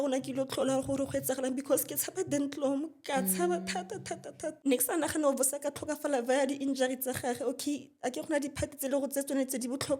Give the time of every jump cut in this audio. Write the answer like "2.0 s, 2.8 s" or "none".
4.6 s